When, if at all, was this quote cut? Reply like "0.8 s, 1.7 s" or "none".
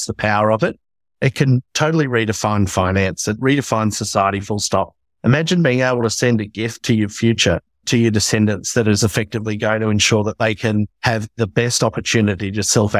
3.4 s, 7.8 s, 10.9 s